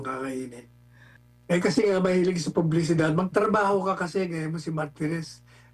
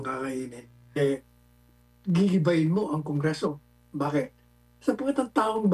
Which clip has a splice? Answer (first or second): second